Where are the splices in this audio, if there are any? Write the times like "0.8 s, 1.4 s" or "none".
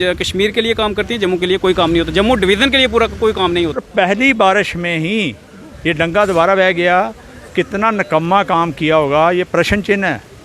3.8 s